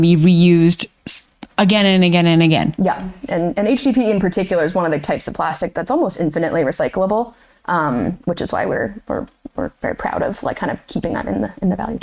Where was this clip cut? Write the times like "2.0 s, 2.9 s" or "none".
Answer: none